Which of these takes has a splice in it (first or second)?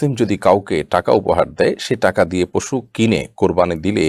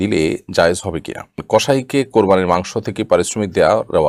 second